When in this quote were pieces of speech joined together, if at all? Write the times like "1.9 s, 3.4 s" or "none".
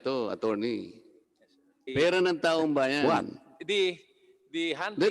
3.0 s